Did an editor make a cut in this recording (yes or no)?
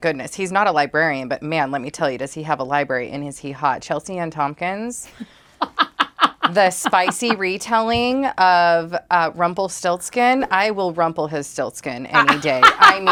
no